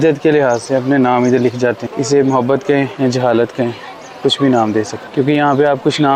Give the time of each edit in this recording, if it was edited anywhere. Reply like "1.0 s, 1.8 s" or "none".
1.9 s, 2.9 s, 5.0 s